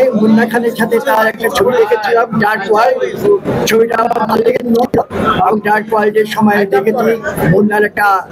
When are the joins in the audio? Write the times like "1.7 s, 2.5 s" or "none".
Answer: none